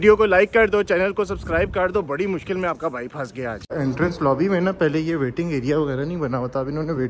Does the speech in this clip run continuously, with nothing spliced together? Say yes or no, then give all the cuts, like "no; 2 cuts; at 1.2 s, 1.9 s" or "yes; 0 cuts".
no; 1 cut; at 3.7 s